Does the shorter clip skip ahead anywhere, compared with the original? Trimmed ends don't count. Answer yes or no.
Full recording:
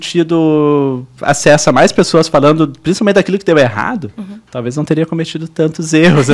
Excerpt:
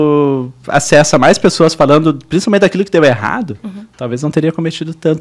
no